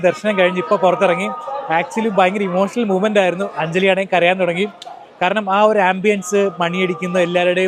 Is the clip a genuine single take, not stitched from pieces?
yes; 0 cuts

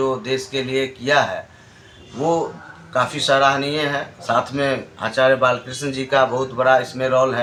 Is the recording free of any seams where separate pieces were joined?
yes; 0 cuts

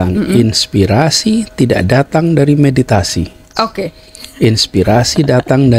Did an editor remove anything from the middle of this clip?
no; 0 cuts

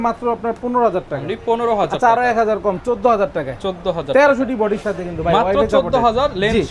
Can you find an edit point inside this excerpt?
no; 0 cuts

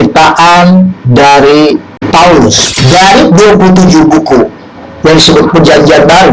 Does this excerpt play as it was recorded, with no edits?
no; 2 cuts; at 1.9 s, 2.7 s

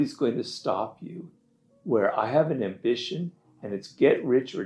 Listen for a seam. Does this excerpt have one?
no; 0 cuts

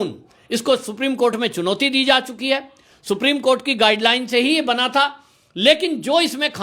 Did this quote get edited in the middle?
no; 0 cuts

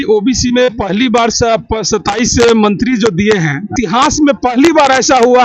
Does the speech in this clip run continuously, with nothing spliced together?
no; 1 cut; at 3.7 s

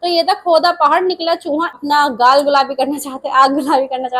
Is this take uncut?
no; 1 cut; at 1.8 s

